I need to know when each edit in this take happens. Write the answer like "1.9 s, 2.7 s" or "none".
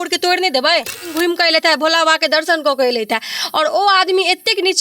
1.1 s